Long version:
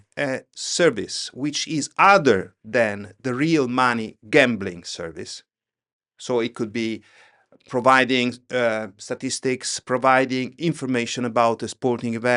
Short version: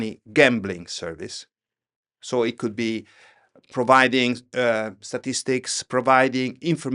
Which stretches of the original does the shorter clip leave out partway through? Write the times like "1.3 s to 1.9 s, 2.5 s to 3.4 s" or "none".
none